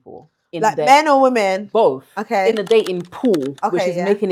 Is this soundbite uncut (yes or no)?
yes